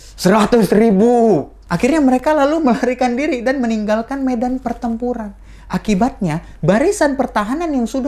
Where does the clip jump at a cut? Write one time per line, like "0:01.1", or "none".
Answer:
0:01.6